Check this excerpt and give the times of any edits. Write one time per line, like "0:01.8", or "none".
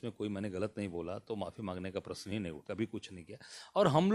0:02.6